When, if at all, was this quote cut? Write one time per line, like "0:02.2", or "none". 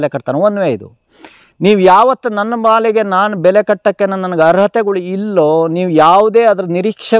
none